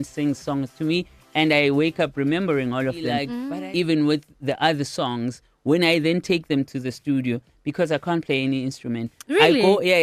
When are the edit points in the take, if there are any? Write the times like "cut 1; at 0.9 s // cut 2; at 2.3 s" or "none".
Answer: cut 1; at 3.4 s